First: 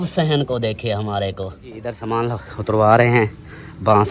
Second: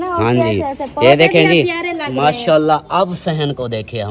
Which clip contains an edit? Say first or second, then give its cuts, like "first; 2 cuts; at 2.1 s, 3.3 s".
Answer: first; 1 cut; at 2.0 s